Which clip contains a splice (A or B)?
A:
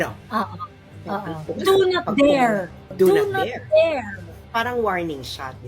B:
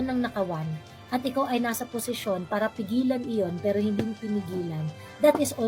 A